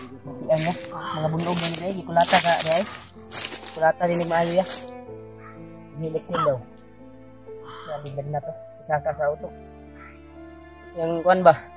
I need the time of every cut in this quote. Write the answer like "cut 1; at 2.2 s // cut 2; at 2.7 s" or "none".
cut 1; at 4.7 s // cut 2; at 5.9 s